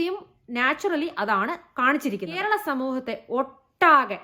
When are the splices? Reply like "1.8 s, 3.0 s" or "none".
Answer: 2.4 s